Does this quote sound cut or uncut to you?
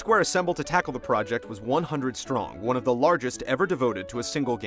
cut